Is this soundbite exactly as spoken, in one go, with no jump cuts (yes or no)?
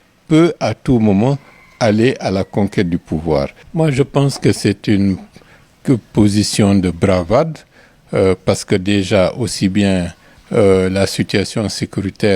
no